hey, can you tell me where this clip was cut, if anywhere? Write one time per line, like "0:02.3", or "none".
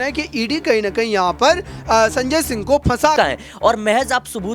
0:03.2